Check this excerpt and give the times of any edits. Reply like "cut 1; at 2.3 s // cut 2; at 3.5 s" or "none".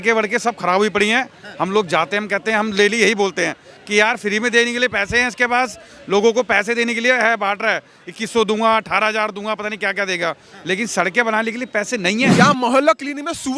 cut 1; at 12.3 s